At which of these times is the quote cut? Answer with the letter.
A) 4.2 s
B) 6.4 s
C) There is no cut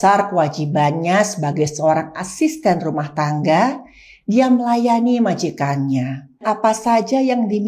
B